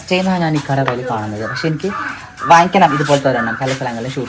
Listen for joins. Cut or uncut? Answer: uncut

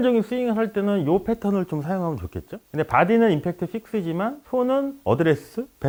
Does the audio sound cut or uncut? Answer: uncut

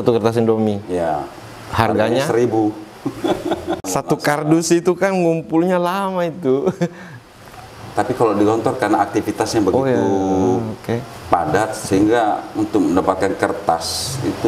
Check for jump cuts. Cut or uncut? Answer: cut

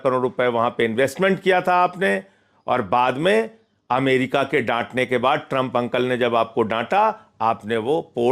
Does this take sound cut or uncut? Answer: uncut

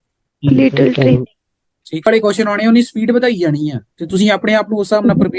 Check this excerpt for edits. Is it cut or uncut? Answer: cut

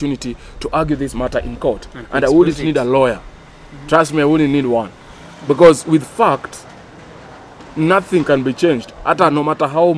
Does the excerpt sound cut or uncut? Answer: uncut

